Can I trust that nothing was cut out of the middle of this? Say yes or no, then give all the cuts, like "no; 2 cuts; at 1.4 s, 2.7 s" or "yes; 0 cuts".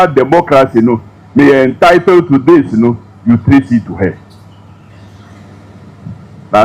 no; 1 cut; at 4.9 s